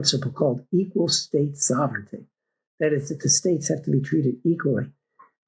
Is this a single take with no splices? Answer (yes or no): yes